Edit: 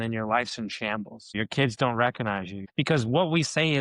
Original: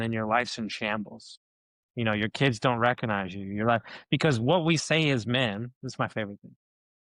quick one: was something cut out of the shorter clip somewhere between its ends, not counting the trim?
yes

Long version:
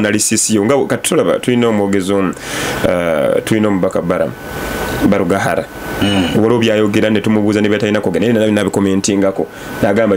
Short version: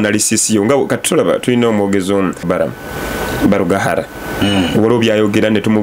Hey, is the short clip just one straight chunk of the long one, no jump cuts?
no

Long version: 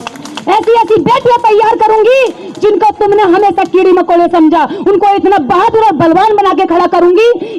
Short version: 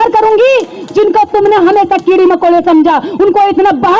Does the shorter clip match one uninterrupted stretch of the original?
yes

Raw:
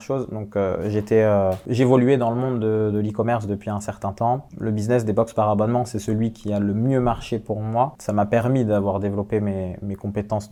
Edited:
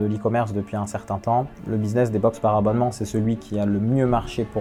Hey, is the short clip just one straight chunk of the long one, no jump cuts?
yes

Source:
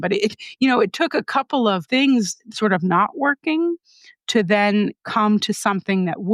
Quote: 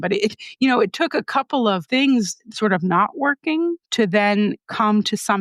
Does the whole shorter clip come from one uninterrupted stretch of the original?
no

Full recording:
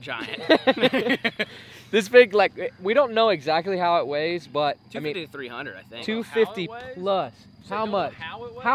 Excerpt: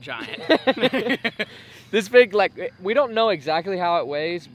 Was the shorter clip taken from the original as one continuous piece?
yes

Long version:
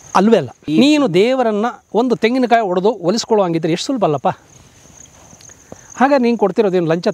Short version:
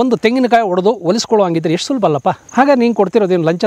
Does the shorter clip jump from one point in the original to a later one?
yes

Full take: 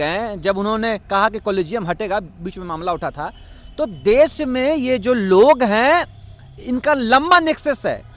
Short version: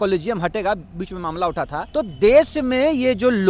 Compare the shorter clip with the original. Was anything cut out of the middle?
yes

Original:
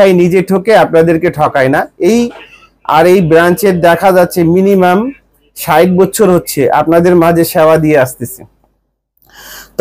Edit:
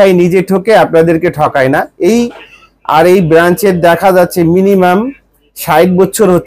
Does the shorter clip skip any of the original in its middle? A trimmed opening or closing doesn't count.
no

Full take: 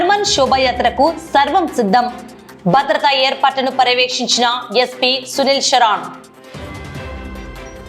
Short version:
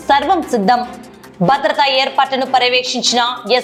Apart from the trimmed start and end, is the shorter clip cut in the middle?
no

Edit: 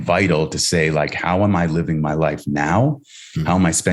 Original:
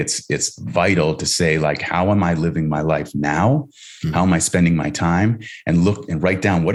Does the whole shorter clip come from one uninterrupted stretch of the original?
yes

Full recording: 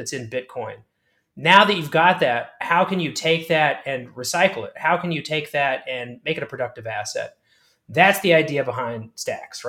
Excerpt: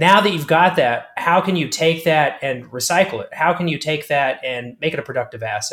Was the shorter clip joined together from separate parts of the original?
no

